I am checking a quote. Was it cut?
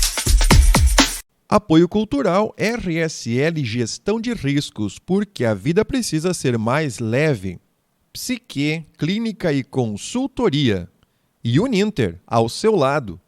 yes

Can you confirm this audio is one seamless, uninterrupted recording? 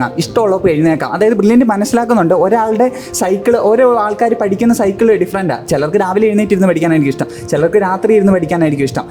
yes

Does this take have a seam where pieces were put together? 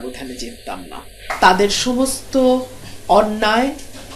yes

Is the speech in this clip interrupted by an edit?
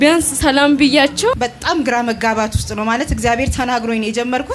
yes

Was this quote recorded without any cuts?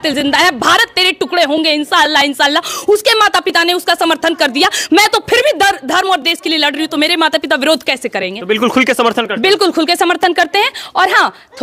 yes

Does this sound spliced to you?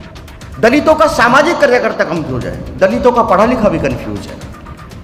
no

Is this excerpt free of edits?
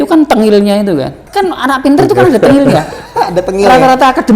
no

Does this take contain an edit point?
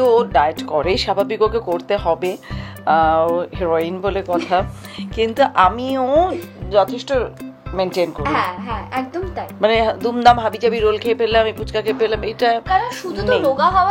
no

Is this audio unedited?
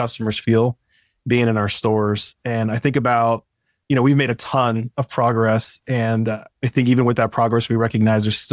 no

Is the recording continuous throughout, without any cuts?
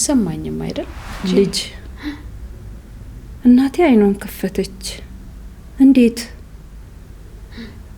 no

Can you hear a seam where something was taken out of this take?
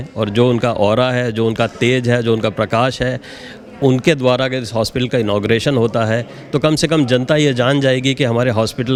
no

